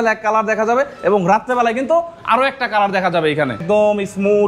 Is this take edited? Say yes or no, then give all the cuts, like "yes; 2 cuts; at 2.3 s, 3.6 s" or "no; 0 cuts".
yes; 1 cut; at 3.6 s